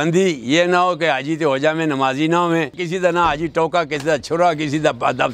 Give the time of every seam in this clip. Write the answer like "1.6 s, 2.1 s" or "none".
2.8 s